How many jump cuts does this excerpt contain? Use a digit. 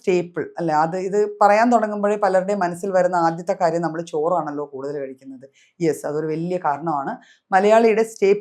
0